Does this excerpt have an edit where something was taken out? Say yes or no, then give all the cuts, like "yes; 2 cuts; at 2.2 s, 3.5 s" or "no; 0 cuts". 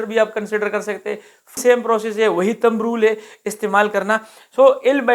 yes; 1 cut; at 1.6 s